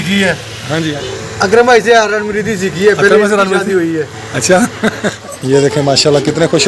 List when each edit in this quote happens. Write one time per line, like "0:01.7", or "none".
0:01.0
0:05.3